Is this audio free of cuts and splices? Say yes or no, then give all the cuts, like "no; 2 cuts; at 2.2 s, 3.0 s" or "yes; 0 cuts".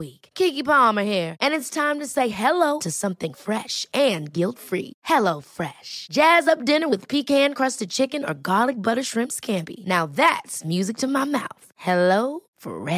yes; 0 cuts